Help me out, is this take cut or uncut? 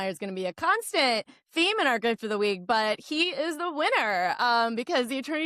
uncut